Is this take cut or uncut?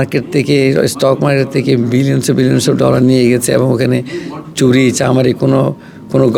uncut